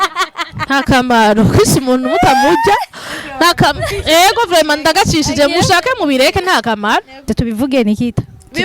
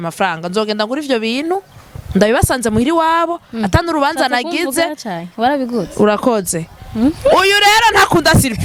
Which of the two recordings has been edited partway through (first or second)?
first